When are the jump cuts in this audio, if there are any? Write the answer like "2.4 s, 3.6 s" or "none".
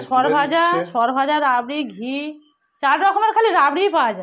none